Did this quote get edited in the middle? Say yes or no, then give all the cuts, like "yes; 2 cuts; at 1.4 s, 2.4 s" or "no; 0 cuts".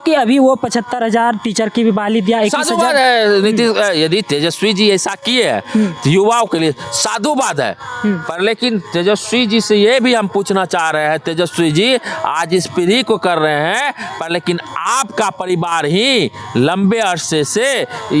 no; 0 cuts